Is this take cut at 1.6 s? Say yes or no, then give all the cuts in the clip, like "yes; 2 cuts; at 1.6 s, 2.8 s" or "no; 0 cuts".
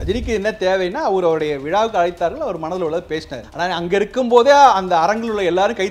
no; 1 cut; at 3.4 s